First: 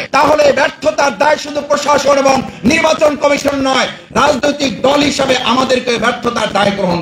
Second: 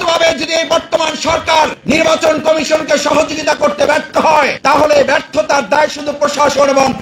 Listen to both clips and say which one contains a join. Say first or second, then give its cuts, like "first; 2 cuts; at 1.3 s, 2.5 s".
second; 1 cut; at 1.8 s